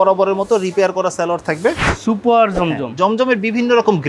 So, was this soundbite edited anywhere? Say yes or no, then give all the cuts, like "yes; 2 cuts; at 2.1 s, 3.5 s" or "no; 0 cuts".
yes; 1 cut; at 1.9 s